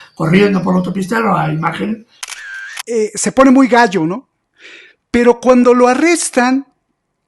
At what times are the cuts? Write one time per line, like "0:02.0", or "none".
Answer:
0:02.2